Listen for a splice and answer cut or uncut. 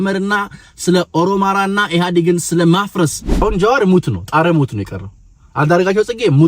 cut